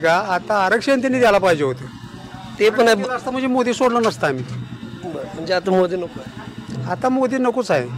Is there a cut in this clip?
no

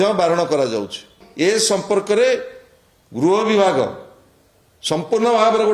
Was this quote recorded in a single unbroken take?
no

